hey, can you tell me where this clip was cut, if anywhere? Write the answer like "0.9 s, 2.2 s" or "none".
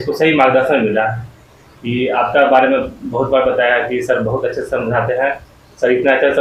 none